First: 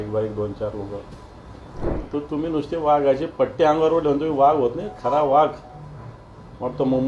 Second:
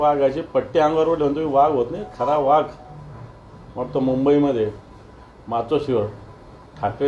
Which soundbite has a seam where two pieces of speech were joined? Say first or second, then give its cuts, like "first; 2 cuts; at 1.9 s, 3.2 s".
first; 1 cut; at 1.9 s